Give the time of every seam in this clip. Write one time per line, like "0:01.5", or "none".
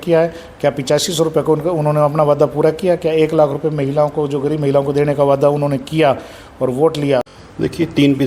0:07.2